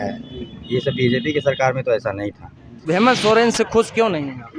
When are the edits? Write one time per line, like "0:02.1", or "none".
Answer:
0:02.8